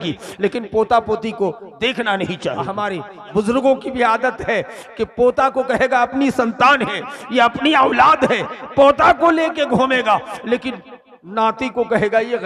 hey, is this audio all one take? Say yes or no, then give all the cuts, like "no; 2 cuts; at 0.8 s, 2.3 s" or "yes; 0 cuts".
no; 1 cut; at 2.8 s